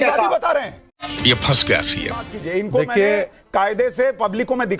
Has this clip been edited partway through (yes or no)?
yes